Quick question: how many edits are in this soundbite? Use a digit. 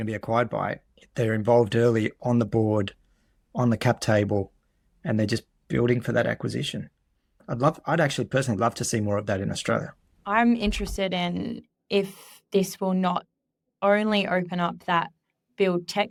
0